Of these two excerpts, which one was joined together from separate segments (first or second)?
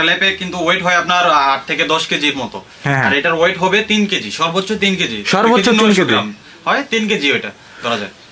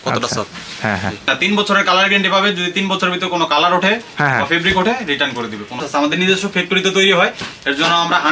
second